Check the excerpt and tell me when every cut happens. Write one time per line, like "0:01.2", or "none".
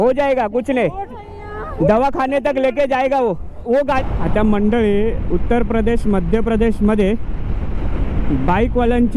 0:04.0